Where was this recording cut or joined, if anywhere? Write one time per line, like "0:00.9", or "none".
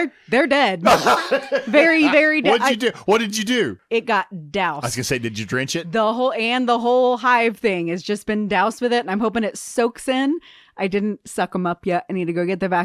0:03.7